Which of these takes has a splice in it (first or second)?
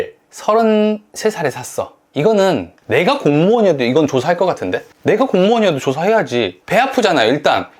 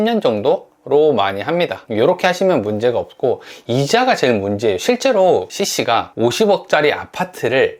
second